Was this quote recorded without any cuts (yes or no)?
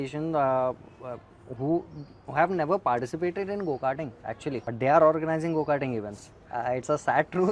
no